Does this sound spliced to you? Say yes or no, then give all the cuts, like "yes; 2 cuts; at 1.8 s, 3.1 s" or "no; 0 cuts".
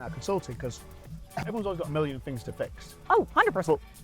yes; 1 cut; at 1.4 s